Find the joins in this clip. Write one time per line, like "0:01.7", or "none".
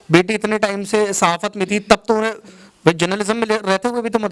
none